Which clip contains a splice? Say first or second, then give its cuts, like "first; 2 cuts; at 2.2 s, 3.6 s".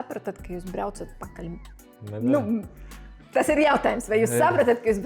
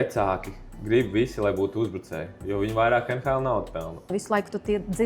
second; 1 cut; at 4.1 s